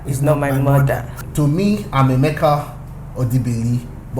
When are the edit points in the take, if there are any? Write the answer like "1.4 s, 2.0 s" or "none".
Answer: 1.2 s